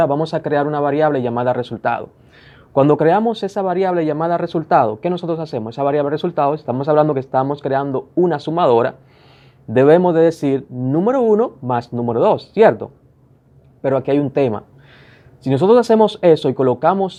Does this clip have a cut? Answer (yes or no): no